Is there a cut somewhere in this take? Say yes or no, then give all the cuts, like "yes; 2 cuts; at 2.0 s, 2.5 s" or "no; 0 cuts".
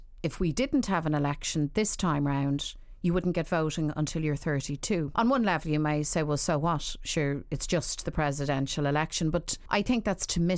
yes; 2 cuts; at 5.1 s, 9.6 s